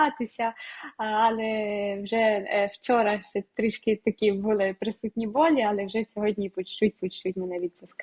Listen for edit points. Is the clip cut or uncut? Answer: uncut